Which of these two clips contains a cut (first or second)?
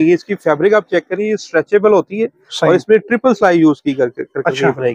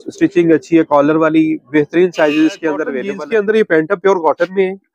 second